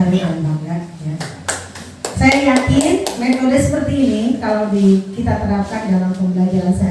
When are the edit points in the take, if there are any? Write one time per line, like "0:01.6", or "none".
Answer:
none

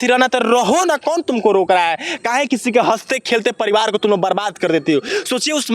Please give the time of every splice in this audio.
none

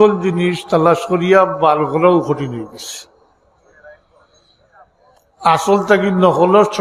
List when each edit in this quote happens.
none

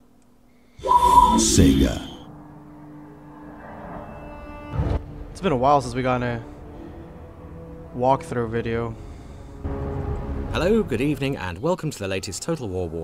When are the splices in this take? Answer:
0:02.2

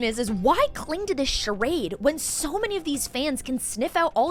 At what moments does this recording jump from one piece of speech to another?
none

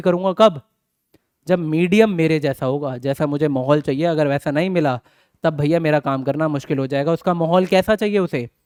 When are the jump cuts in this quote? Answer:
none

